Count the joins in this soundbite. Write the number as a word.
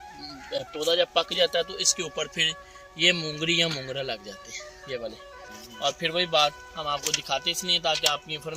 one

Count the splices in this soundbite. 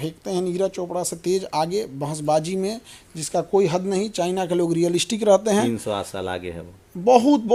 zero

